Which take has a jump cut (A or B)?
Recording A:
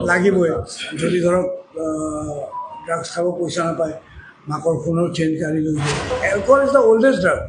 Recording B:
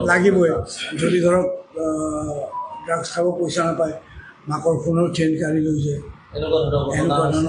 A